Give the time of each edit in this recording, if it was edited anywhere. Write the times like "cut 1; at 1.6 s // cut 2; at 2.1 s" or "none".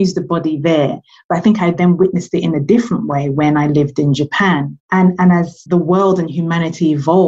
cut 1; at 4.8 s // cut 2; at 5.6 s